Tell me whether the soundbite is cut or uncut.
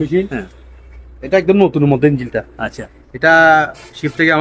uncut